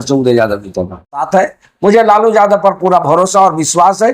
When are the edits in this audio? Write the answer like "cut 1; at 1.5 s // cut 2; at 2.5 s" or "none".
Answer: cut 1; at 1.3 s